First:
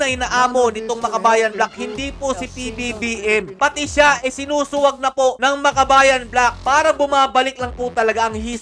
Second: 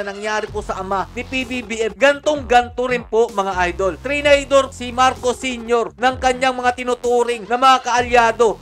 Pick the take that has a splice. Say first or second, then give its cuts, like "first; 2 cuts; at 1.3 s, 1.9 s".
first; 2 cuts; at 3.5 s, 6.6 s